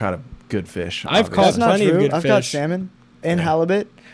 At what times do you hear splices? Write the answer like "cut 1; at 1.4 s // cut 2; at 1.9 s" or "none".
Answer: none